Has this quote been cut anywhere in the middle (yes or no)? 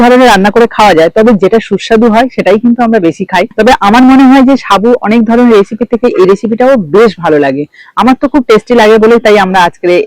no